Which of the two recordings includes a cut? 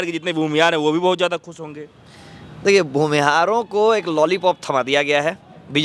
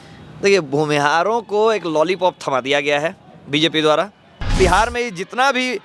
second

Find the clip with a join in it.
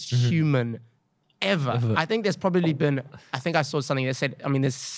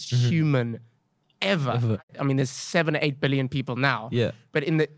second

